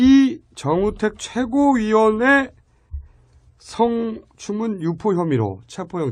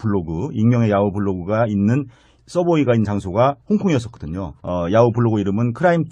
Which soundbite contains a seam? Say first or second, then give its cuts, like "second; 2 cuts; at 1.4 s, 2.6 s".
second; 1 cut; at 1.2 s